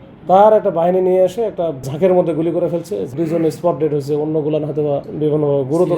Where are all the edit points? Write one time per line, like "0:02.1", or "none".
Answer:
0:01.8
0:03.1
0:05.1